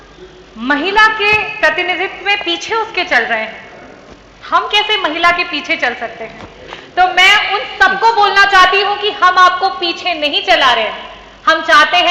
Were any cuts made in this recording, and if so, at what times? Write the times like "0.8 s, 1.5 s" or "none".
none